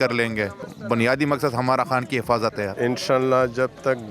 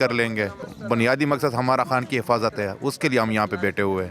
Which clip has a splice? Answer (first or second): first